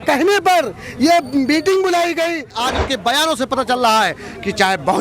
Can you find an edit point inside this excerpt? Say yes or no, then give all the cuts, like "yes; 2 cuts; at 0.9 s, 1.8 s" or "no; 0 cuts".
yes; 1 cut; at 2.6 s